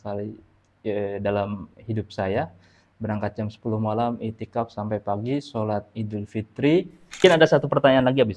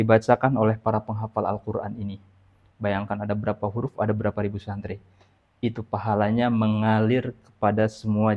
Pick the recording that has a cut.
first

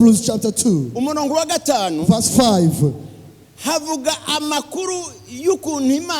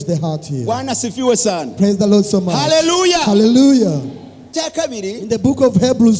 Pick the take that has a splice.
second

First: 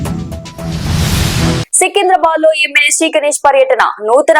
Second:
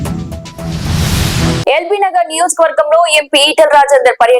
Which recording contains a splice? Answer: second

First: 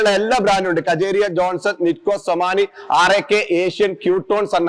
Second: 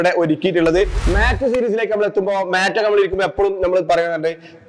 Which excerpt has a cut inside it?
second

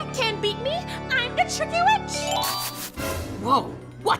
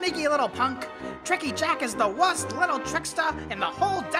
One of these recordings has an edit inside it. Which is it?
first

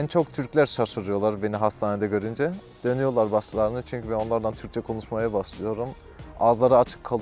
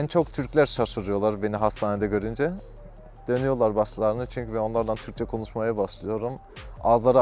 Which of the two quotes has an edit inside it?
first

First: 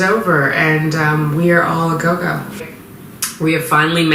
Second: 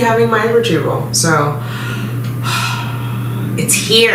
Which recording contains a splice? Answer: first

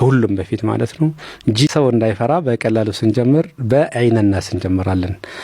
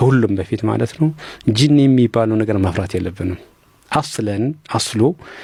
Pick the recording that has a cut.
first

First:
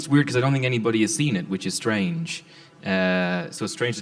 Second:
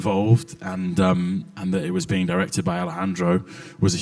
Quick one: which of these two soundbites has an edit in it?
second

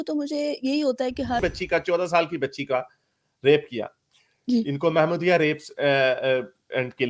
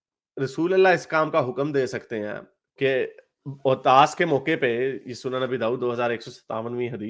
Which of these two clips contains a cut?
first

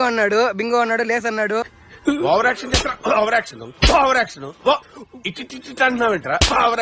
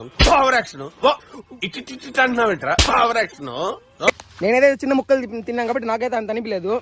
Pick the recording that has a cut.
second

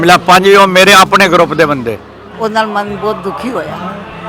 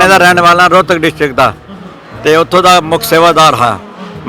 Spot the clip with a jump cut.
first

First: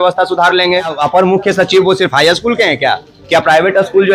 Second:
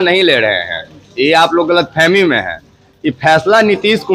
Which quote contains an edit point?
first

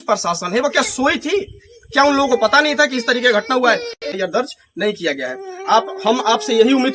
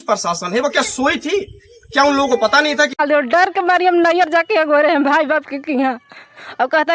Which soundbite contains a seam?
second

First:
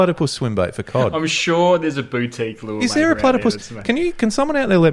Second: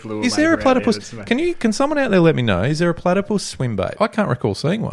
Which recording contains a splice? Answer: second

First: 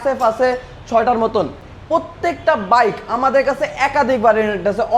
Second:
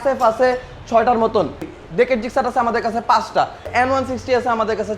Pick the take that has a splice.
second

